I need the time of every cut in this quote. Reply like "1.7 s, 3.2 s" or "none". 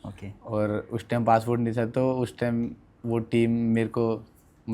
none